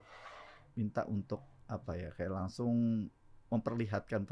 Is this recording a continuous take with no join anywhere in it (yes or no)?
yes